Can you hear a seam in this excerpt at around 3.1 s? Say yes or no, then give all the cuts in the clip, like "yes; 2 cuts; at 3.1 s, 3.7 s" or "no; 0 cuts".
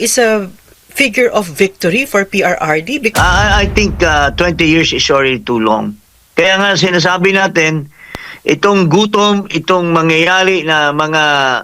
yes; 1 cut; at 3.1 s